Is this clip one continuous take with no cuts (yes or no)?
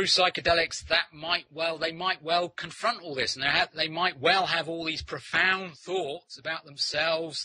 yes